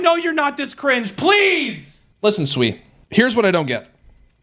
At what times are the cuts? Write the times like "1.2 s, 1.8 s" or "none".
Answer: 2.1 s

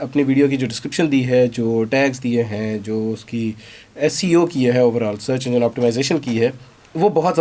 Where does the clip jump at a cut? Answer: none

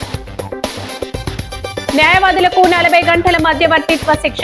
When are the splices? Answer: none

